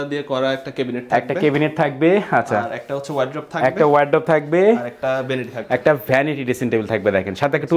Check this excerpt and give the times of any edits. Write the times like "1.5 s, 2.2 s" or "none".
none